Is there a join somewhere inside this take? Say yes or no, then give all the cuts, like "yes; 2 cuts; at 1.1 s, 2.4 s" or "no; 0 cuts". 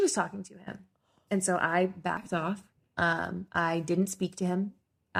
no; 0 cuts